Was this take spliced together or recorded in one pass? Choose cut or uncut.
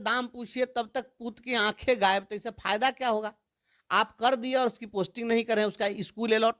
uncut